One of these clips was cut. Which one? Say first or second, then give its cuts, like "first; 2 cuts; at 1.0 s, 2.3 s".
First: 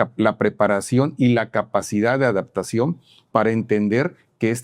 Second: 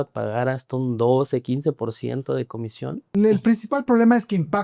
second; 1 cut; at 3.1 s